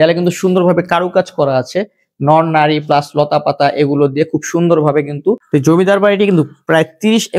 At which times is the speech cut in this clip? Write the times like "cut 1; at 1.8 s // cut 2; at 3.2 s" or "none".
cut 1; at 5.4 s